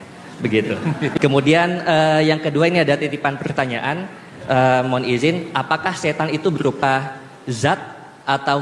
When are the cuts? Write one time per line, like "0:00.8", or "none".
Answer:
0:01.1

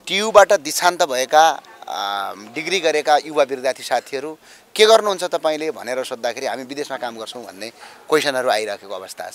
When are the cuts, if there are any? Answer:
none

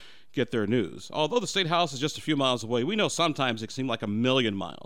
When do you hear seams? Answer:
none

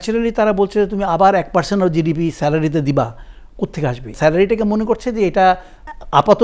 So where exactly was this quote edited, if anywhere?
0:04.1

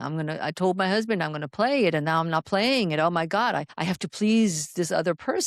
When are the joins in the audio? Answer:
0:03.7

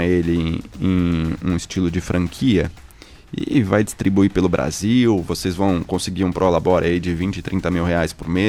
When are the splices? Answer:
none

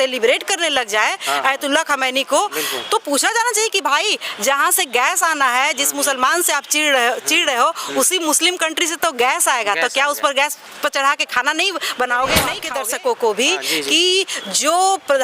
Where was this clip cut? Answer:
0:12.6

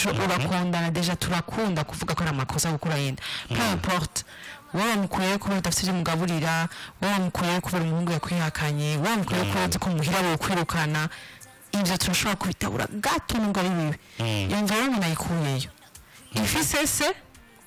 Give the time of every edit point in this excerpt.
none

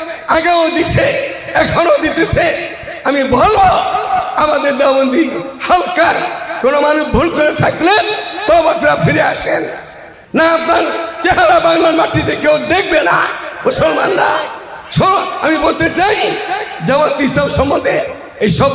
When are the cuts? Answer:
0:10.1

